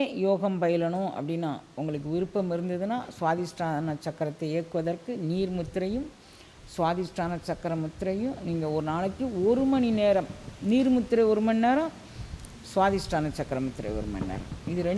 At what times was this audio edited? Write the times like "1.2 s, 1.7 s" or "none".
none